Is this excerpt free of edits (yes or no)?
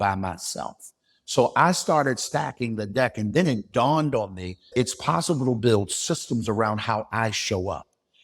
no